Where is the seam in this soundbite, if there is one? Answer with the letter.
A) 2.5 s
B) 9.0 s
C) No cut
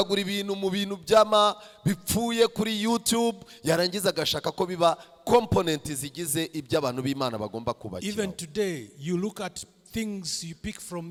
C